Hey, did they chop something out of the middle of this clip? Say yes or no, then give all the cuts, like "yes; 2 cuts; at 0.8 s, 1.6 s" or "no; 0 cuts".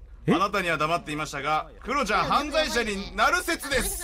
yes; 1 cut; at 1.8 s